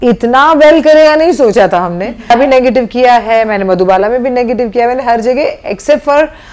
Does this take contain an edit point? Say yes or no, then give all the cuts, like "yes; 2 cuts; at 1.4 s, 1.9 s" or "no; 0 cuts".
yes; 1 cut; at 2.3 s